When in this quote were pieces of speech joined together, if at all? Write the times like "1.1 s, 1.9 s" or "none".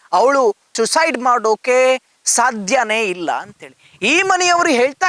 none

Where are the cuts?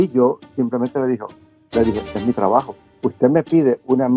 2.8 s

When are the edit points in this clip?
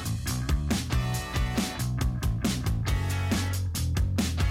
2.1 s

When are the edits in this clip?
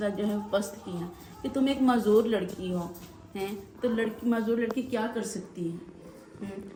none

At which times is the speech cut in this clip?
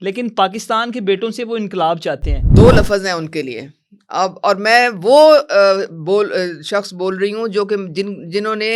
2.4 s

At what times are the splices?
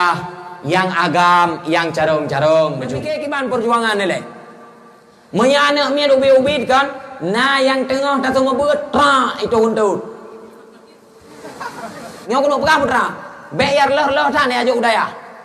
3.1 s, 12.2 s

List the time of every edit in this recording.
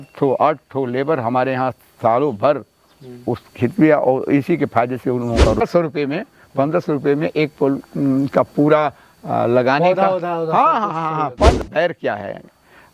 5.6 s, 11.6 s

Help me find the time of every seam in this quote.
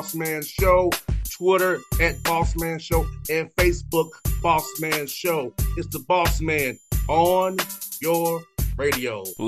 none

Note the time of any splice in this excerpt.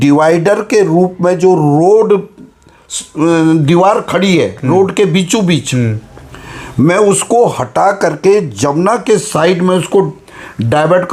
none

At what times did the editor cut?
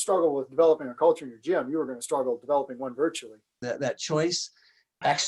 3.6 s

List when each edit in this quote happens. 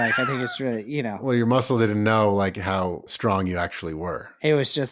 1.3 s

